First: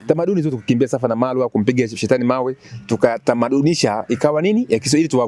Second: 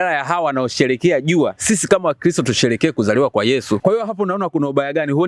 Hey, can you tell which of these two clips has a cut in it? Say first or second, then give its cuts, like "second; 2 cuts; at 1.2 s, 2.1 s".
second; 1 cut; at 3.8 s